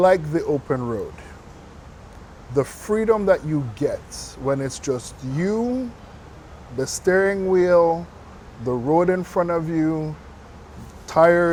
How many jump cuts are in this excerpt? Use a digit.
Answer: 0